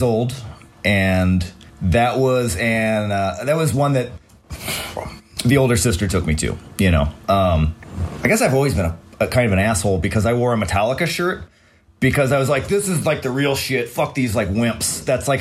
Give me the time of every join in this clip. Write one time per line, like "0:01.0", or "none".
0:07.8